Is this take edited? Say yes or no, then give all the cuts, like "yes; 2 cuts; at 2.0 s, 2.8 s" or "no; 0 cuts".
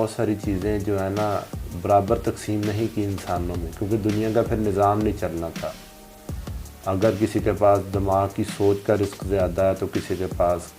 no; 0 cuts